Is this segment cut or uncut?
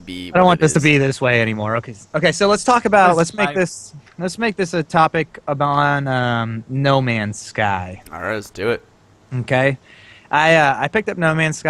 cut